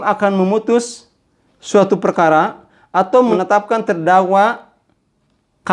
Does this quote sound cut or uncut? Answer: cut